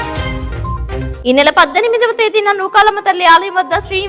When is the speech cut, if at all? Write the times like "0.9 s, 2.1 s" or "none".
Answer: 1.0 s